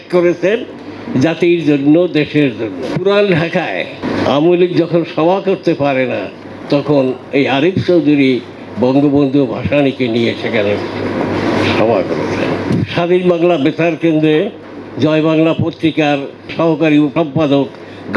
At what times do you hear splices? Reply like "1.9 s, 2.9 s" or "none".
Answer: 2.9 s, 4.0 s, 12.6 s, 16.5 s, 17.1 s